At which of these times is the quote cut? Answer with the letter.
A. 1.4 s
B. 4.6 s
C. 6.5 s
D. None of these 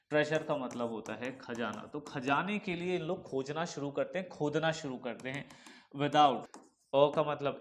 C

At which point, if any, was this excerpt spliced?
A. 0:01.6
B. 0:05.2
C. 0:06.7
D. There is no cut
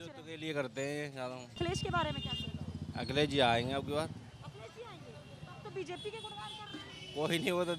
A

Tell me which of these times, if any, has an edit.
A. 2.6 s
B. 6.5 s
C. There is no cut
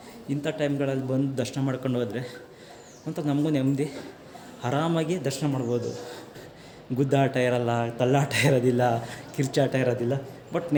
C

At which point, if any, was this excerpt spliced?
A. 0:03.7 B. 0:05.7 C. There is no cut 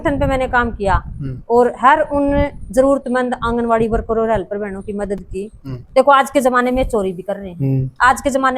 B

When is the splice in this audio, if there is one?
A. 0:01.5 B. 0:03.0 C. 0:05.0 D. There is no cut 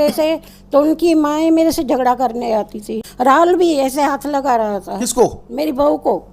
B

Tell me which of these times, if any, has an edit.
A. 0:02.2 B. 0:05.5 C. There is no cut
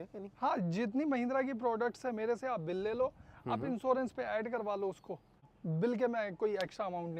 B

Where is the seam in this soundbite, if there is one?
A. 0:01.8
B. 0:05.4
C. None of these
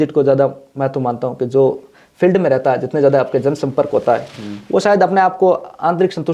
C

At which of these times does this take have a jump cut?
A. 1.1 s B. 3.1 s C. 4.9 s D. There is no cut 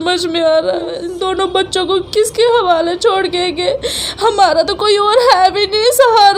A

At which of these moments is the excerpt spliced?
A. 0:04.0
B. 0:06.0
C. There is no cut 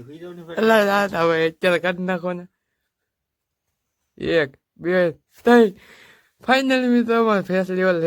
C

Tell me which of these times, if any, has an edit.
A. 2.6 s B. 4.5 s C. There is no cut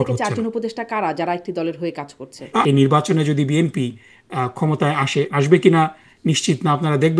A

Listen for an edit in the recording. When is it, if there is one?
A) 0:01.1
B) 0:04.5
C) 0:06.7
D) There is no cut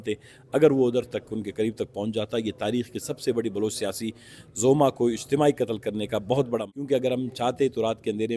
C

